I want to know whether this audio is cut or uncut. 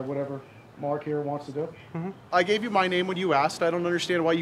cut